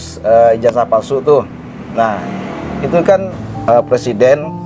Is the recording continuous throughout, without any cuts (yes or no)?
yes